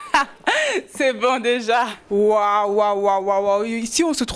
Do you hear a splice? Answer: yes; 1 cut; at 2.0 s

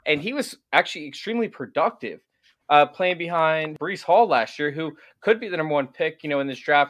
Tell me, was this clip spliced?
yes; 1 cut; at 3.7 s

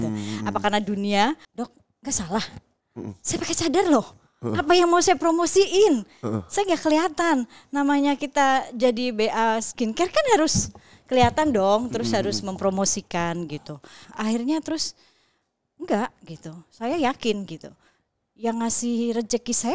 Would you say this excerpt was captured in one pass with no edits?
no; 2 cuts; at 1.5 s, 14.0 s

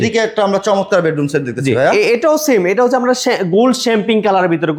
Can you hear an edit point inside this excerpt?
no; 0 cuts

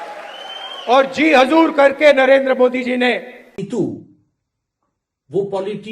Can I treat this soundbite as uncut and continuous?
no; 1 cut; at 3.6 s

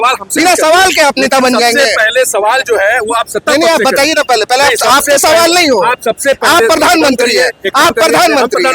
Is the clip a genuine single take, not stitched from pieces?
yes; 0 cuts

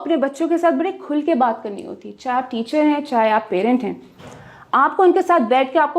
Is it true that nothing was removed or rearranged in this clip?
yes; 0 cuts

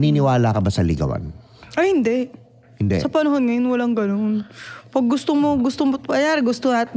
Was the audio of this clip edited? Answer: no; 0 cuts

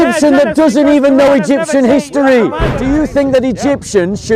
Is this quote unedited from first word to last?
no; 1 cut; at 2.7 s

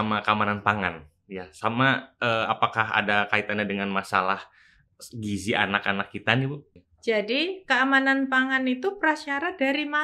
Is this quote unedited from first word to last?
no; 1 cut; at 6.7 s

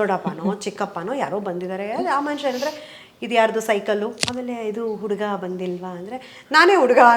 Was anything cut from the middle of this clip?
yes; 1 cut; at 4.2 s

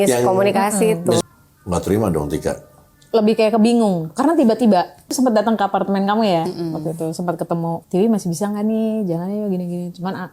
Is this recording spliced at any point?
yes; 3 cuts; at 1.2 s, 5.1 s, 7.8 s

